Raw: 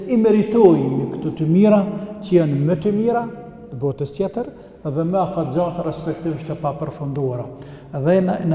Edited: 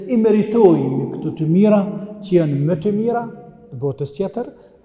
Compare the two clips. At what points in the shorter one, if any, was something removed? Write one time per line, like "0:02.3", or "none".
none